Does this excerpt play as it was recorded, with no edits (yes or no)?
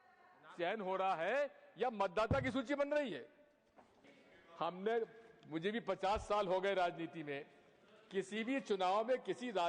no